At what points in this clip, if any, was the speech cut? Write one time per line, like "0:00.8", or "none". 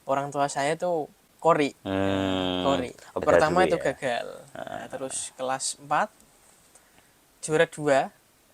0:01.2
0:03.2